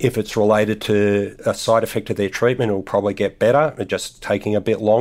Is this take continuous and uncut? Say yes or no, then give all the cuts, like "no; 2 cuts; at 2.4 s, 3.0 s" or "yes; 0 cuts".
yes; 0 cuts